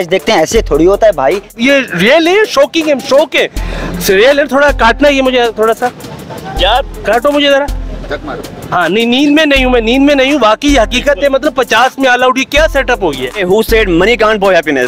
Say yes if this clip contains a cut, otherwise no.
yes